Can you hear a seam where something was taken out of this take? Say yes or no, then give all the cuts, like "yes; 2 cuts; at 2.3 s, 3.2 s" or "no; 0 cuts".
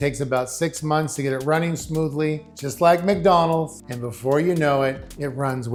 no; 0 cuts